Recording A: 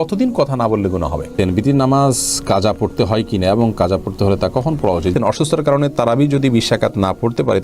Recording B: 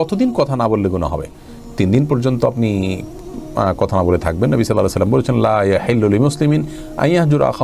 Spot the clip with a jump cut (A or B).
A